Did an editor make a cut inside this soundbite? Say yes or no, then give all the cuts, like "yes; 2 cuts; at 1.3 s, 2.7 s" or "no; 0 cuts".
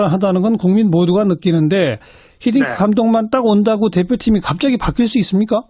yes; 1 cut; at 2.9 s